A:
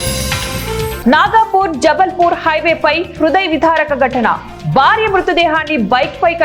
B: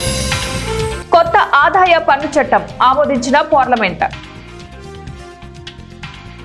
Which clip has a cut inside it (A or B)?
B